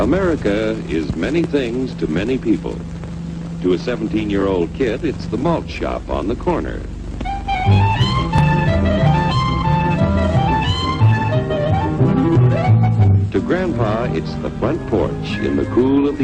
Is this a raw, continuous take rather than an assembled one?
yes; 0 cuts

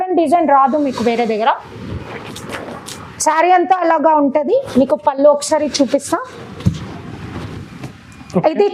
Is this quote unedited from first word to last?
yes; 0 cuts

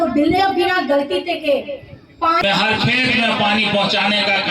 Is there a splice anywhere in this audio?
yes; 1 cut; at 2.4 s

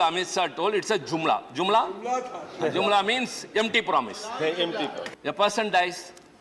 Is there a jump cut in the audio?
yes; 1 cut; at 5.1 s

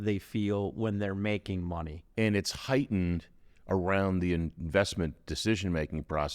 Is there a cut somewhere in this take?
yes; 1 cut; at 2.0 s

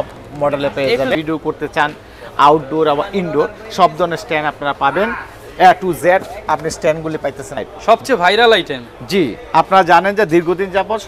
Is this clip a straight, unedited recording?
no; 2 cuts; at 1.2 s, 7.7 s

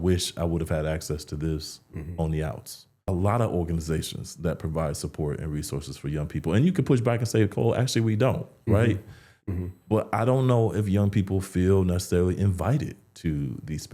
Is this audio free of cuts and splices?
no; 1 cut; at 3.0 s

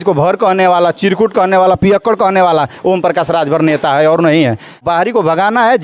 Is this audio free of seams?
no; 1 cut; at 4.8 s

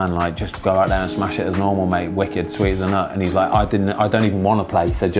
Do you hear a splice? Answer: no; 0 cuts

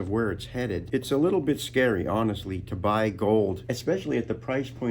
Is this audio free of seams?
no; 2 cuts; at 0.8 s, 3.7 s

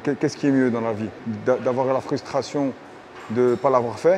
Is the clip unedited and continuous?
no; 1 cut; at 1.1 s

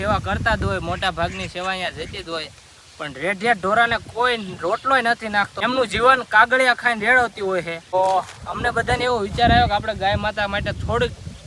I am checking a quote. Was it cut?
yes; 2 cuts; at 5.5 s, 7.9 s

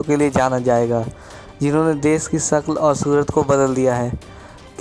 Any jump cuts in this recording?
no; 0 cuts

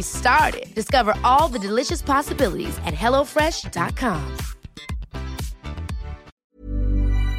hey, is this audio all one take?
no; 1 cut; at 6.3 s

